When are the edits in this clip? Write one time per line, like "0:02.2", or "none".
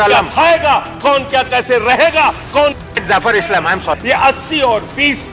0:03.9